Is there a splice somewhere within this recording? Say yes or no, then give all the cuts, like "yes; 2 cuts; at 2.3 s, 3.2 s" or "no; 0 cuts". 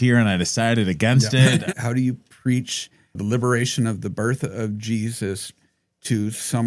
yes; 2 cuts; at 1.7 s, 3.2 s